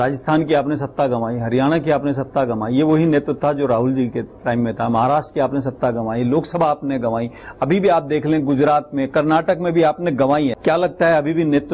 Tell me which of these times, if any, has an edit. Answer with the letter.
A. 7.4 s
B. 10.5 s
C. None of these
B